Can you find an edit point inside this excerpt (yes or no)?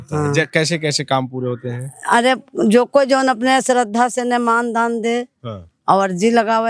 no